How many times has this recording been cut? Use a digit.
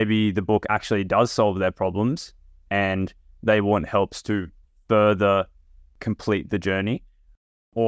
1